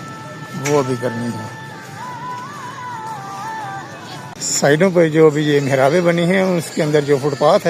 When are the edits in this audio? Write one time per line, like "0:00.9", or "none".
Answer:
0:04.4